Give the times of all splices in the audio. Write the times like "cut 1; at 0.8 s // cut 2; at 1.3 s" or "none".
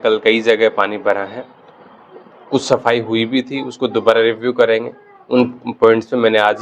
none